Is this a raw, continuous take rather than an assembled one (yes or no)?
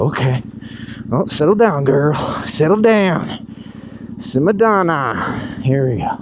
yes